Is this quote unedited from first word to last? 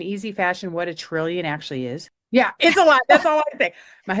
no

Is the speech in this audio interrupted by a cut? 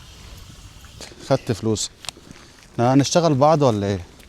yes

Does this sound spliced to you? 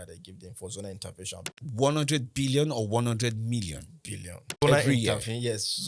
yes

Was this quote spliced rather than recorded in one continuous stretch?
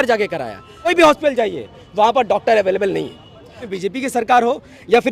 yes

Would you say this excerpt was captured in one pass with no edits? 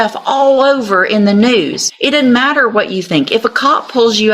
no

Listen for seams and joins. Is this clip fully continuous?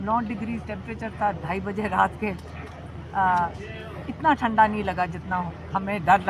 yes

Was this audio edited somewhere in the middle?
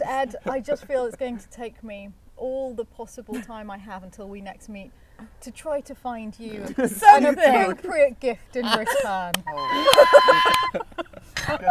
no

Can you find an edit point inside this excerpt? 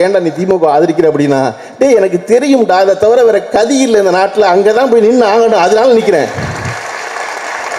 no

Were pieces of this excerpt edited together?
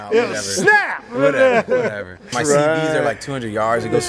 yes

